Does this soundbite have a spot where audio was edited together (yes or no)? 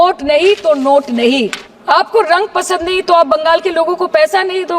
yes